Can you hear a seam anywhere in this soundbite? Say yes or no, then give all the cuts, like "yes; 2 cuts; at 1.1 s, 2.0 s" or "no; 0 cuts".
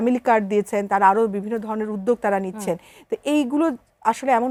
no; 0 cuts